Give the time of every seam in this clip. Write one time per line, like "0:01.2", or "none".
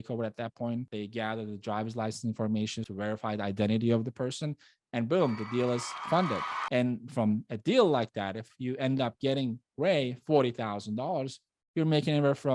0:00.9
0:02.9